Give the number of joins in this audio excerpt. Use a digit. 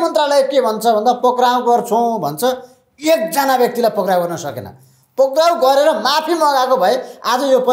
0